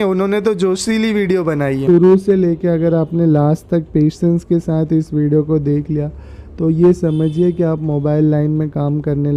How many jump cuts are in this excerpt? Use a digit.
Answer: 1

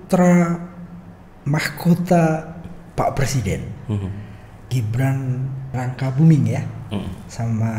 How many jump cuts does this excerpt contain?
1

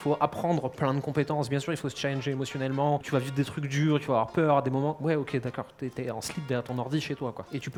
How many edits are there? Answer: 0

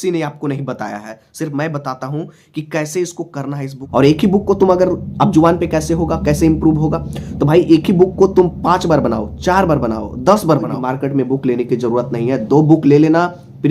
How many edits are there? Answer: 2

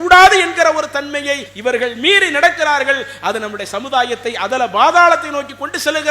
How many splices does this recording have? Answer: 1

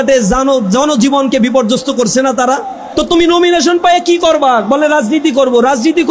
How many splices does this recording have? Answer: 1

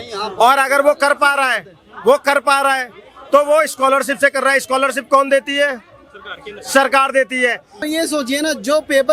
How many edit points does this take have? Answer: 1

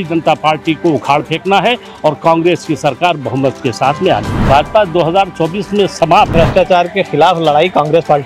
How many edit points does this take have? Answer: 2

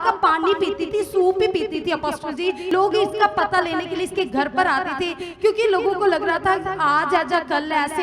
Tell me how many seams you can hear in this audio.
1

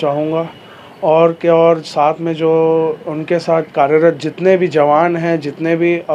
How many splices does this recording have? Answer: 0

